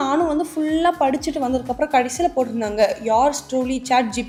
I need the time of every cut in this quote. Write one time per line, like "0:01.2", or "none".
none